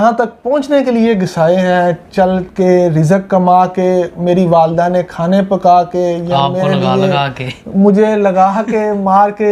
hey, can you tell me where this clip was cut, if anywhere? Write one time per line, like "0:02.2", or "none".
none

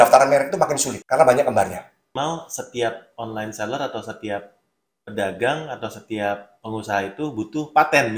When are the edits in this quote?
0:00.9
0:02.1

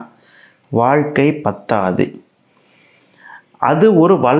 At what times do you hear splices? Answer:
none

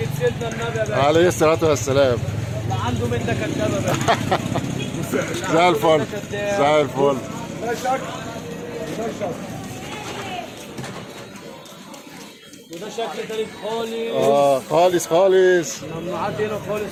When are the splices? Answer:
none

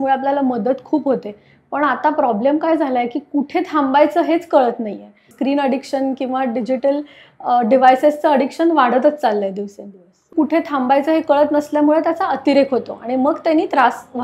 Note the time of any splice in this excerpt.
0:05.3
0:10.3

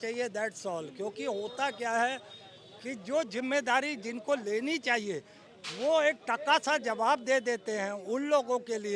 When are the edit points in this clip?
none

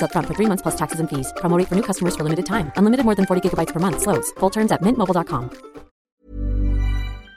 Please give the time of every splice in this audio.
0:06.0

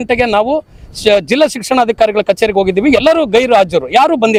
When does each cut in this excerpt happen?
none

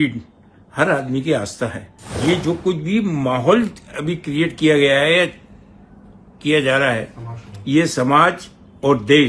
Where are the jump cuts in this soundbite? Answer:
0:02.2

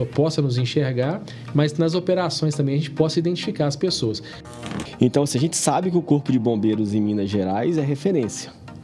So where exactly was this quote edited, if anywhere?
0:04.4

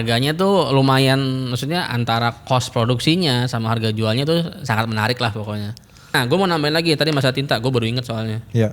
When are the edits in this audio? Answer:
0:06.1

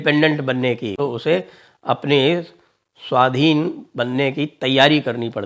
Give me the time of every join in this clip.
0:00.9

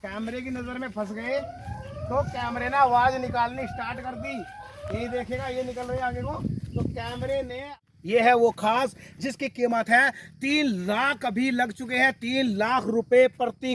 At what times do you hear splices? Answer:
0:07.8

